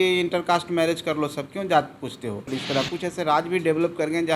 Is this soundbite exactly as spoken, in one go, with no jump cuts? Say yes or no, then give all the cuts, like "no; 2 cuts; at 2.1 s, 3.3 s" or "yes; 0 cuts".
no; 1 cut; at 2.5 s